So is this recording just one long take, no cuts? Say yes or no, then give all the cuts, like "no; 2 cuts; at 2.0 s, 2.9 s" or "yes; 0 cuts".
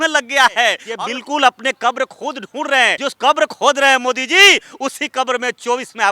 no; 2 cuts; at 0.8 s, 3.0 s